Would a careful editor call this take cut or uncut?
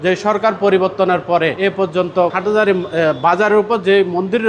uncut